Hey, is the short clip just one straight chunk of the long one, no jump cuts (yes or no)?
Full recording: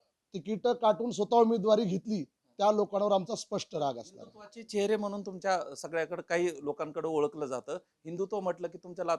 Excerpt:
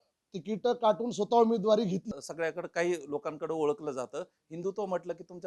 no